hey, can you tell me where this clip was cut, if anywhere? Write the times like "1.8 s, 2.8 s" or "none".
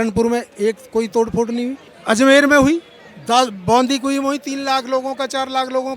1.9 s

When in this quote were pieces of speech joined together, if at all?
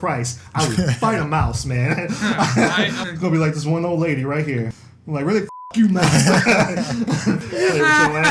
3.0 s, 4.8 s, 7.5 s

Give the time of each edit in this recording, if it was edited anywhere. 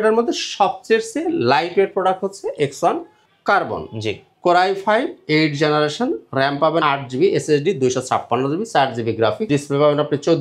6.8 s, 9.4 s

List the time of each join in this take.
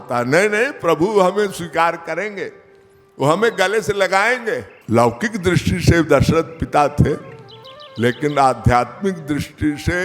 4.7 s

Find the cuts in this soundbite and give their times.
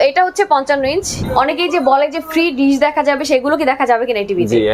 1.1 s

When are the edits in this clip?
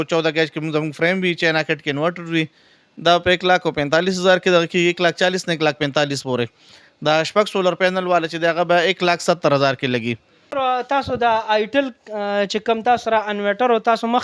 10.4 s

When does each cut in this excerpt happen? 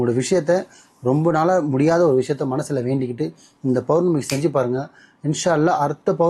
none

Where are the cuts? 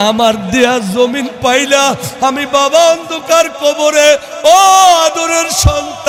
none

